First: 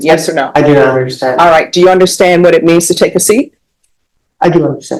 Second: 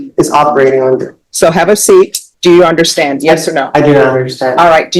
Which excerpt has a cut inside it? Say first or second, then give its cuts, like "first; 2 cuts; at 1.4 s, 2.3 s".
second; 2 cuts; at 1.2 s, 2.2 s